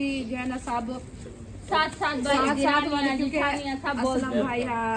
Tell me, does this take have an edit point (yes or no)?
no